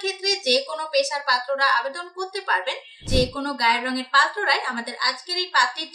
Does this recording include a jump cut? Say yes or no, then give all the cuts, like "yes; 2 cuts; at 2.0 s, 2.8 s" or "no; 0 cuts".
yes; 1 cut; at 3.0 s